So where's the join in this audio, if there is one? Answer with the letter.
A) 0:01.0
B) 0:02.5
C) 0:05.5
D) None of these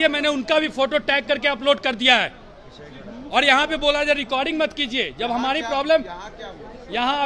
D